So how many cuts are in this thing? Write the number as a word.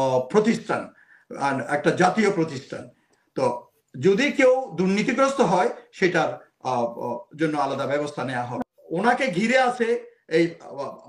one